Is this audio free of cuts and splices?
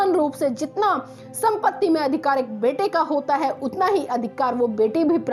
yes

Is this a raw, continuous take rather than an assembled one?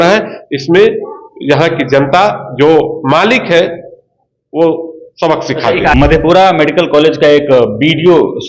no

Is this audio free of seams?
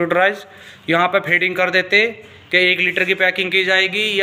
yes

